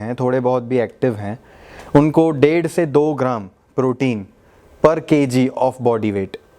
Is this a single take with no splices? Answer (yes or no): yes